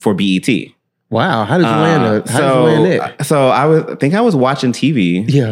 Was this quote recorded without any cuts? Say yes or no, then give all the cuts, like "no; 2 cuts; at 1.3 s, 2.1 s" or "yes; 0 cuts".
yes; 0 cuts